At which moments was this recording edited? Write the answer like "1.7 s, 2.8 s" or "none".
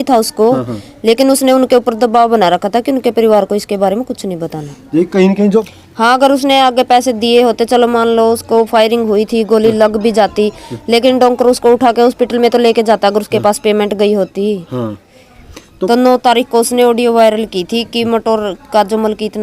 5.7 s, 15.8 s